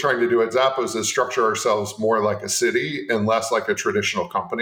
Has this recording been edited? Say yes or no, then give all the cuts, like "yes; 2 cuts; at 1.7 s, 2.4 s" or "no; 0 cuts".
no; 0 cuts